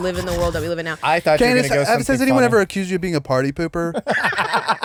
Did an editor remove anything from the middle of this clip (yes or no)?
no